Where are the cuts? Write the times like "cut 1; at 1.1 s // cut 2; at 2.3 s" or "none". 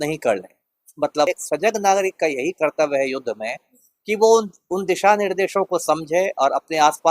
cut 1; at 1.3 s